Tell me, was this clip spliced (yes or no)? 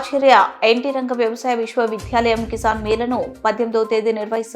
no